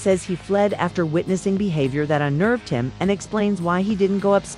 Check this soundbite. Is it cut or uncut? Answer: uncut